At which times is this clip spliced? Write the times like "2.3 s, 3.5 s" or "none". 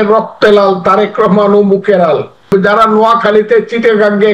2.5 s